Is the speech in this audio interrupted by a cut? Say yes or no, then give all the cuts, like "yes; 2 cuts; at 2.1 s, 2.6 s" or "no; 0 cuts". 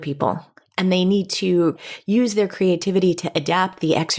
no; 0 cuts